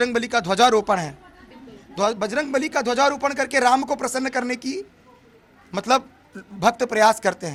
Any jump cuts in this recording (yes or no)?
no